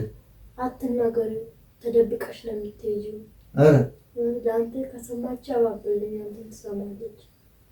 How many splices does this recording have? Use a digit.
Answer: 0